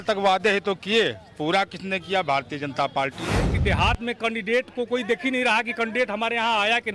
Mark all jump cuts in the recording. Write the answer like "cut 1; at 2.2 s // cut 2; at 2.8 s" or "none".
cut 1; at 3.5 s